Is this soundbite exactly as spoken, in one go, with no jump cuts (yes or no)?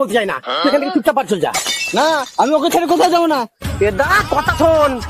yes